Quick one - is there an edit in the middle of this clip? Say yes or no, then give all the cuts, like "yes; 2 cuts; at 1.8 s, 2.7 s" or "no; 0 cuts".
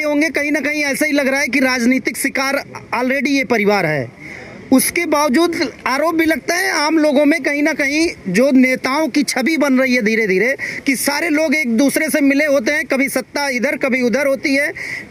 no; 0 cuts